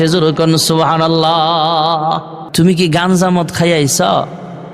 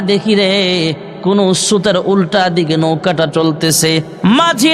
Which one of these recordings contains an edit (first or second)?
first